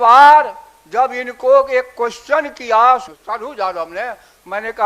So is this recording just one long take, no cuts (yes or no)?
no